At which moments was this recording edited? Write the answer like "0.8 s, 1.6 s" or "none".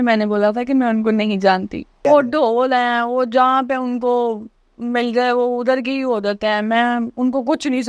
1.9 s